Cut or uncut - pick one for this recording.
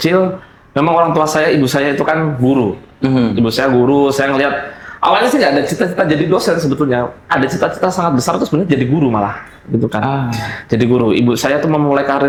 uncut